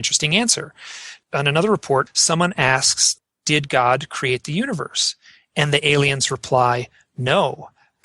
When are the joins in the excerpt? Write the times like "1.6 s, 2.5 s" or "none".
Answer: 1.2 s, 2.1 s, 3.0 s

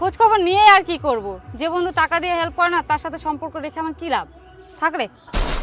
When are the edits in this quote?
none

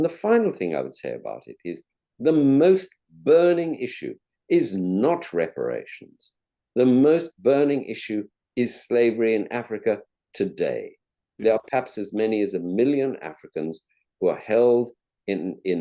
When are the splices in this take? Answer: none

